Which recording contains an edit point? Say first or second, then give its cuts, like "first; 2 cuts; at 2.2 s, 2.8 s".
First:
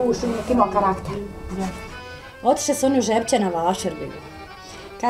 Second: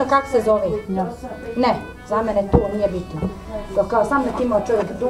first; 1 cut; at 1.9 s